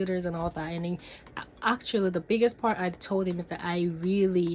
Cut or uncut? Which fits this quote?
uncut